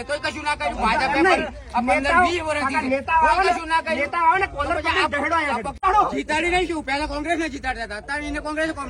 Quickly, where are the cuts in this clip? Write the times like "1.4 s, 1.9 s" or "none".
5.7 s